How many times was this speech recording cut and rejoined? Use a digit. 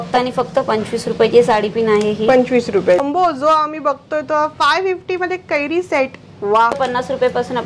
2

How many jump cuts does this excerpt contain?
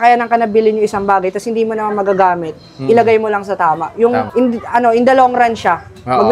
1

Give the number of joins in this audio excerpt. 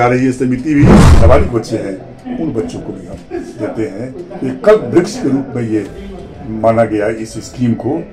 1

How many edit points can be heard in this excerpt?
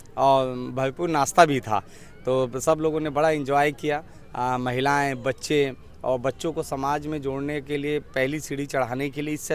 0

